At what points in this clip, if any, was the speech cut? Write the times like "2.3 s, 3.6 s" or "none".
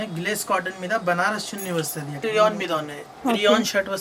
2.2 s